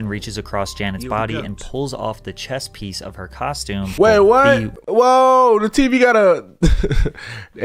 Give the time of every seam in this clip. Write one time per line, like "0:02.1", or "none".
0:03.9
0:04.7